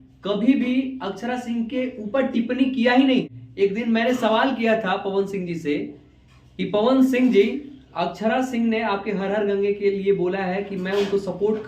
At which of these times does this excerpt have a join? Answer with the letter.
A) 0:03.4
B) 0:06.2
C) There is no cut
A